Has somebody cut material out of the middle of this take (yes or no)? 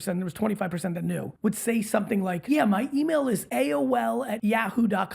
yes